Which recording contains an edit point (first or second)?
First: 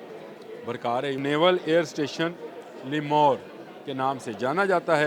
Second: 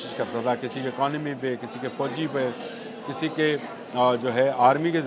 first